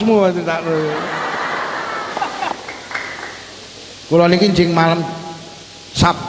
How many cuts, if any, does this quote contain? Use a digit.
1